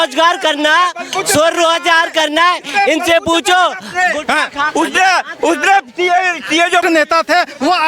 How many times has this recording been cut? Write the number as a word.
one